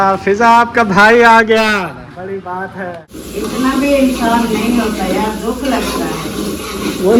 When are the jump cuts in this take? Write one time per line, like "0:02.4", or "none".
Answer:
0:03.2